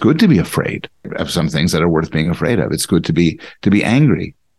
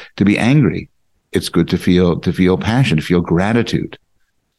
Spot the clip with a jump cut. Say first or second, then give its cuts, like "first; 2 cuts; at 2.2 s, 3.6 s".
first; 1 cut; at 1.1 s